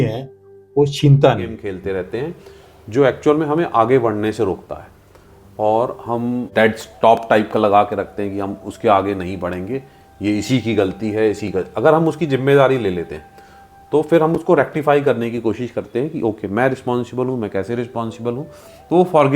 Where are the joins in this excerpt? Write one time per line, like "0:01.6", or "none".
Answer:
0:01.7
0:06.5

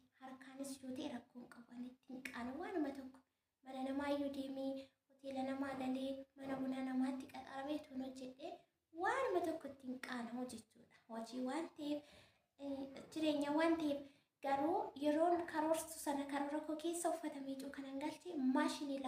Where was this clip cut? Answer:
none

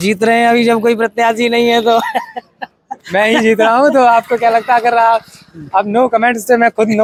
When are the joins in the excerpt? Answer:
none

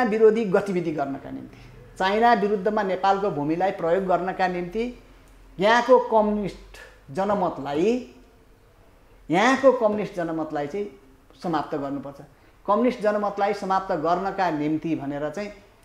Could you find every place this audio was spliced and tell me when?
none

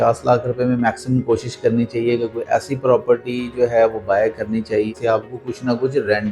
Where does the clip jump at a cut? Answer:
0:04.9

